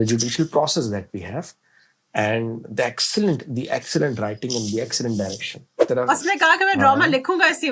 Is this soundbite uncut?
no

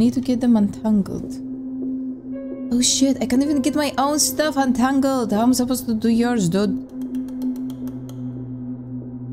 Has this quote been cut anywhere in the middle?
no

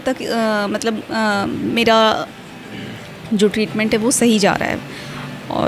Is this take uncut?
yes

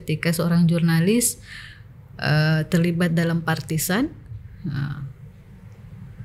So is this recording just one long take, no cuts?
yes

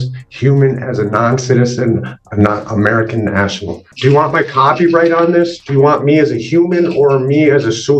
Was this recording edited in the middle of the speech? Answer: yes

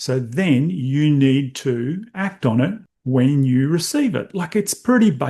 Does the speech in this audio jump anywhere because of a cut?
yes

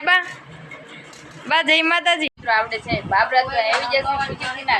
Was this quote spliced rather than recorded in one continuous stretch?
yes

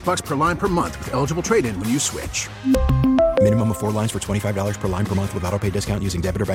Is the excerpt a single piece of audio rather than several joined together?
yes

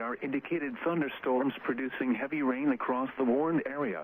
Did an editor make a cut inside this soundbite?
no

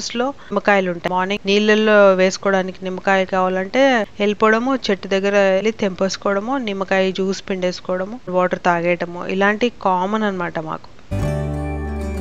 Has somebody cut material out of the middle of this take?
yes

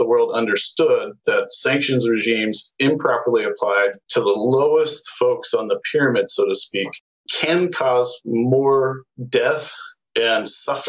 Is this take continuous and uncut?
yes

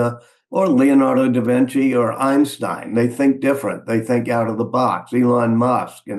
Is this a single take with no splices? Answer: yes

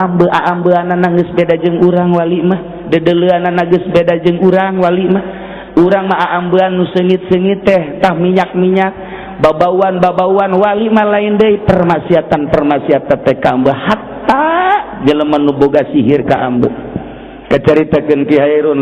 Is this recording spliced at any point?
no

